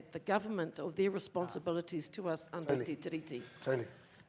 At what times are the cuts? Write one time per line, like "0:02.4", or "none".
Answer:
none